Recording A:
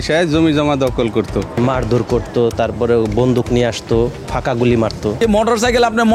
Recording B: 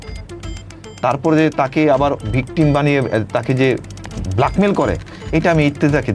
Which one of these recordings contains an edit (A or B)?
A